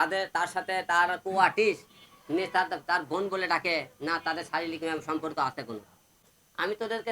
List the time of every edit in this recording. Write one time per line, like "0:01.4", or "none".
0:06.2